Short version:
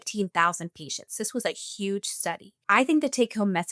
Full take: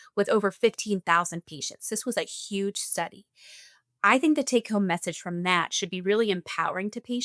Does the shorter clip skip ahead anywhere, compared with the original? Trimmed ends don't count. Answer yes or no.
yes